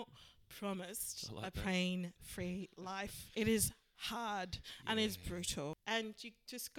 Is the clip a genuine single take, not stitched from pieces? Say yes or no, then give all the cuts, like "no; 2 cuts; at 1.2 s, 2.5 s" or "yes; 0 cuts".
no; 2 cuts; at 3.2 s, 5.8 s